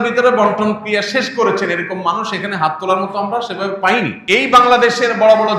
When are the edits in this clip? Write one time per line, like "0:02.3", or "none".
0:04.2